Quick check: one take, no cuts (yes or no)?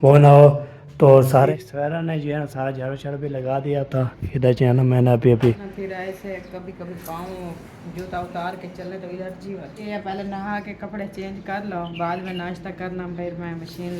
no